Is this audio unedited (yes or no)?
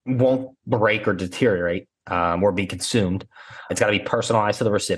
no